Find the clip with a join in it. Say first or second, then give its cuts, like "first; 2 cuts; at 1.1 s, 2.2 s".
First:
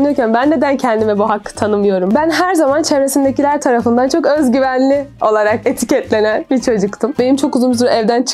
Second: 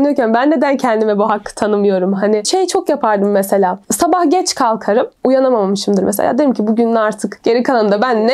first; 2 cuts; at 2.1 s, 7.1 s